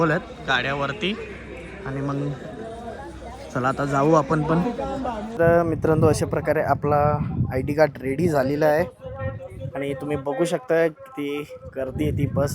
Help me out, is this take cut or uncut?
cut